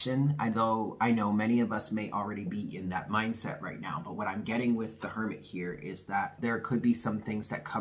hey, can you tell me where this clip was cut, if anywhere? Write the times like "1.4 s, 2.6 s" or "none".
6.4 s